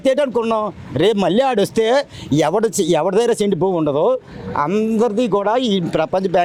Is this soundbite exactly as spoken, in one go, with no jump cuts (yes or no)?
yes